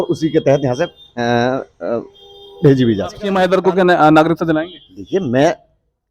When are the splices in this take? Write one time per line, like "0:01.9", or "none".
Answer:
0:03.2